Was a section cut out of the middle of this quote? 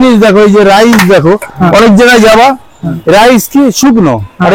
no; 0 cuts

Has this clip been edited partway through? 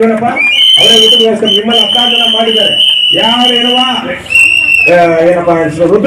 no; 0 cuts

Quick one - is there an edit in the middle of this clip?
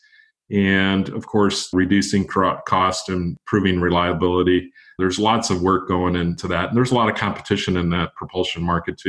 yes; 4 cuts; at 1.7 s, 3.4 s, 4.8 s, 6.4 s

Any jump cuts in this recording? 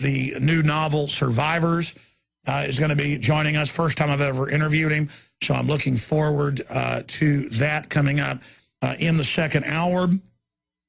yes; 1 cut; at 8.8 s

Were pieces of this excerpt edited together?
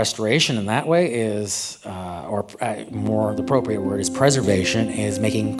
no; 0 cuts

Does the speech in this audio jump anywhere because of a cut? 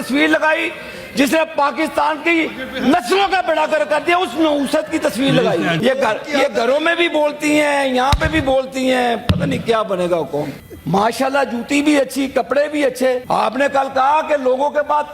yes; 3 cuts; at 5.8 s, 10.6 s, 13.2 s

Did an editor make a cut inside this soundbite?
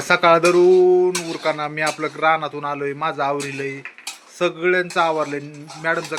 no; 0 cuts

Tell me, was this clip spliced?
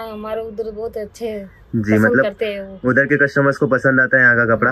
no; 0 cuts

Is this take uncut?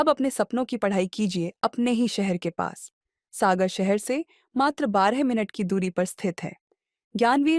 yes; 0 cuts

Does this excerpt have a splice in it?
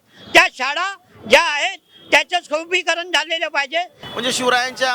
yes; 1 cut; at 4.0 s

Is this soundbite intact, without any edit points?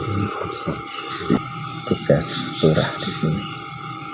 no; 1 cut; at 1.4 s

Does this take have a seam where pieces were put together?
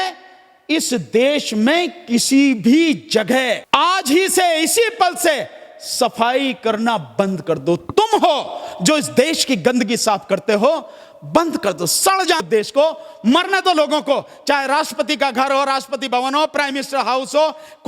yes; 2 cuts; at 3.6 s, 12.4 s

